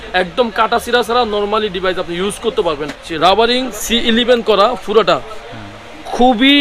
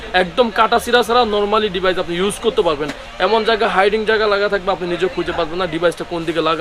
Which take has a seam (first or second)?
first